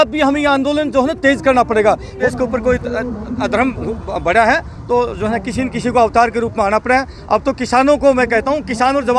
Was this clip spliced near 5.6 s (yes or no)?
no